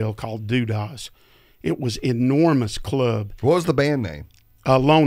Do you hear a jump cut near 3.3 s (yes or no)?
no